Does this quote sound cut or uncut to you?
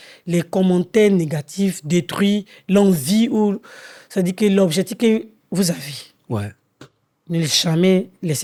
uncut